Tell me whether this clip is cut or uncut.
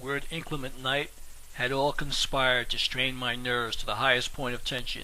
cut